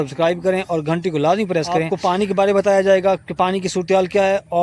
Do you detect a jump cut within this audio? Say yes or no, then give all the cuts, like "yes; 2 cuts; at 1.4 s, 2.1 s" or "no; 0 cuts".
yes; 1 cut; at 1.9 s